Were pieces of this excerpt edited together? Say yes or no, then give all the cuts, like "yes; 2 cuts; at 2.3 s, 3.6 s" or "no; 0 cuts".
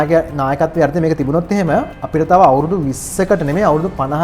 yes; 1 cut; at 2.0 s